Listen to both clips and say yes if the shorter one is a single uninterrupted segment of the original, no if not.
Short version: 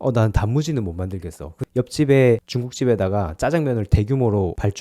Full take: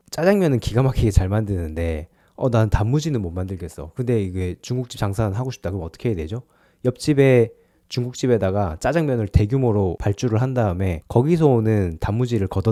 no